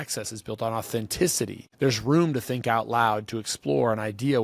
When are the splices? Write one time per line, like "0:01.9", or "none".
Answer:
0:01.6